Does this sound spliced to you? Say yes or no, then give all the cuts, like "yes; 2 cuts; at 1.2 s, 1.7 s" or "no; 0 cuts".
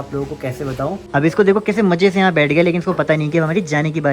yes; 1 cut; at 1.0 s